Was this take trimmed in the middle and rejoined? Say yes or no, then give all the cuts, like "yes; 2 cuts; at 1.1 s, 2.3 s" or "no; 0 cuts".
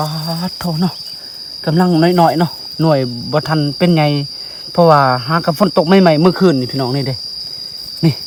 no; 0 cuts